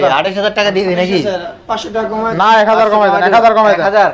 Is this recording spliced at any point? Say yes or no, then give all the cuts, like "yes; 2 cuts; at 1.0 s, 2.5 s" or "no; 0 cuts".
no; 0 cuts